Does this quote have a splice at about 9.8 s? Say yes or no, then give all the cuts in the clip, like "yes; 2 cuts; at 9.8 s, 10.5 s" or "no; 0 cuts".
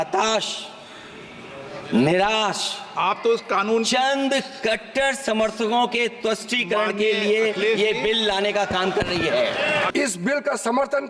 yes; 1 cut; at 9.8 s